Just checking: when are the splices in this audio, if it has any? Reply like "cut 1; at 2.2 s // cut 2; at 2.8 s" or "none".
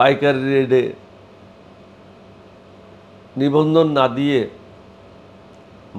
none